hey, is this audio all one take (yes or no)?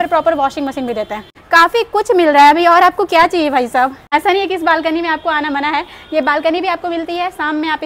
yes